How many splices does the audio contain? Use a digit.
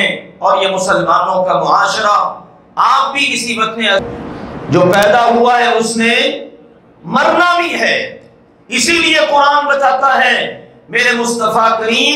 1